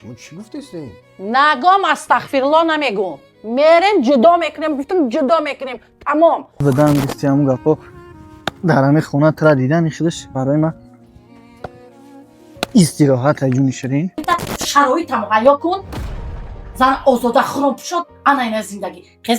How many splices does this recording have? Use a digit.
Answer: 2